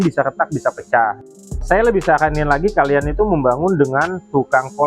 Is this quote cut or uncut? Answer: cut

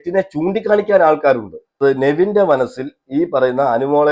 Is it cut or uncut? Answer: cut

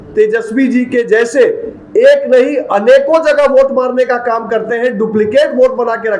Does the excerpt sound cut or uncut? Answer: uncut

